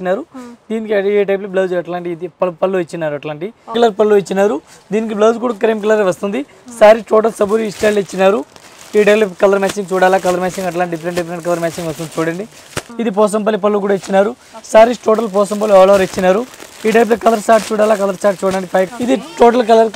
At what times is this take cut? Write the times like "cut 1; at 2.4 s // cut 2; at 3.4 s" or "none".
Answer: cut 1; at 3.7 s // cut 2; at 12.7 s // cut 3; at 18.9 s